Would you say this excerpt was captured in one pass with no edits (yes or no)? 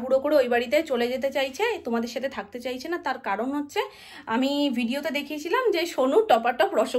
yes